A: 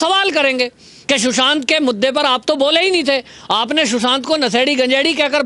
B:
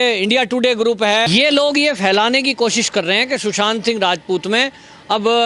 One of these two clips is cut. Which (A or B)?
B